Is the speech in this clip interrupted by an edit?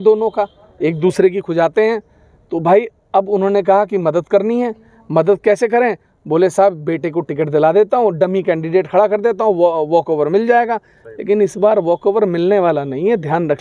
no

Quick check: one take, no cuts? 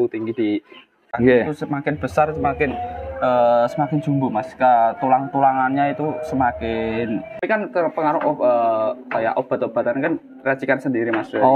no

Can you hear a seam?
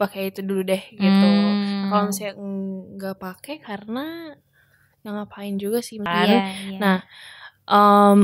yes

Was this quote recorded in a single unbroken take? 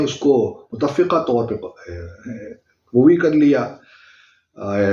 yes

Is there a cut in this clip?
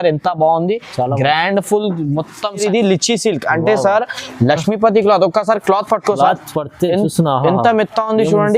yes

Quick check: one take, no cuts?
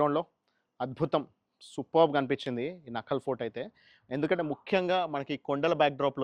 yes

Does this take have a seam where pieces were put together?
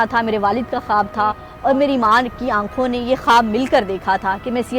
yes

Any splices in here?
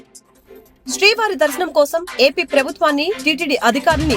yes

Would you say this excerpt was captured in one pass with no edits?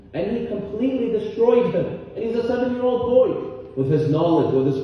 yes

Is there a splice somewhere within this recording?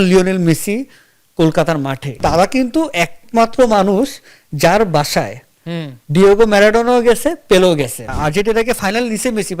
yes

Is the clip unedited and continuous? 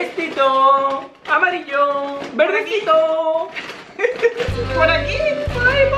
yes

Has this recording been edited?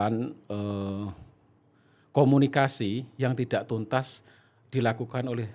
no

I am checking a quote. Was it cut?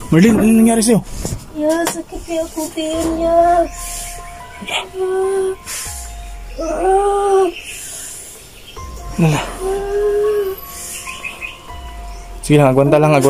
no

